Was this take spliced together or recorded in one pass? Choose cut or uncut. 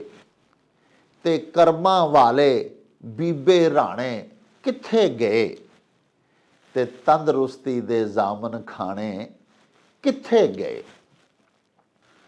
uncut